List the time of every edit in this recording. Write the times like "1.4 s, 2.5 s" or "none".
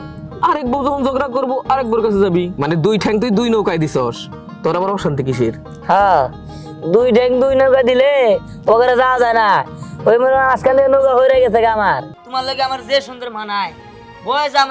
2.5 s, 12.2 s